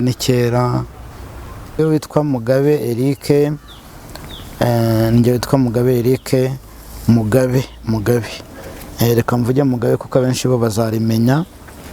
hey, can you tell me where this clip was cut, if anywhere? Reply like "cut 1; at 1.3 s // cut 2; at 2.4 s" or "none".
cut 1; at 1.8 s